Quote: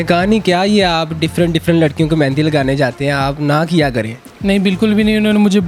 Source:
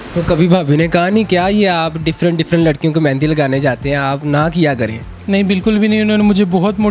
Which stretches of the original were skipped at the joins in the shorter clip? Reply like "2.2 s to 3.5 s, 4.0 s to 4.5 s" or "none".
none